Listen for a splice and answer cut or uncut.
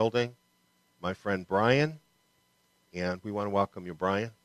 cut